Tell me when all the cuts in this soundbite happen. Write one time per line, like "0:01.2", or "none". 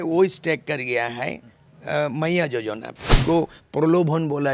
0:03.1